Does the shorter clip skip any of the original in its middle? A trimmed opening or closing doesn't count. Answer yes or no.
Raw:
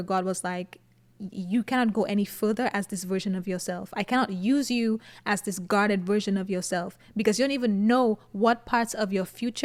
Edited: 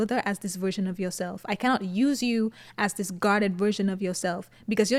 no